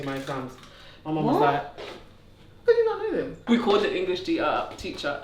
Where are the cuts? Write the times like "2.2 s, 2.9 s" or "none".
3.4 s